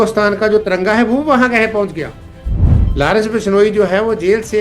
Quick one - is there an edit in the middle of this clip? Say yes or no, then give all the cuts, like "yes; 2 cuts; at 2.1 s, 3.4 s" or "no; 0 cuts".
yes; 1 cut; at 2.5 s